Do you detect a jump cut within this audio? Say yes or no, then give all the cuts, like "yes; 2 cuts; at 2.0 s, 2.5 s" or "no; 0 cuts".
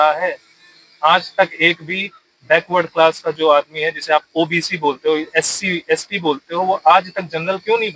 no; 0 cuts